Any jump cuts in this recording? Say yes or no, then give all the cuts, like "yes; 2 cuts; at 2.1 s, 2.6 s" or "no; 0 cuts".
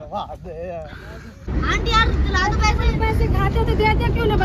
yes; 1 cut; at 1.5 s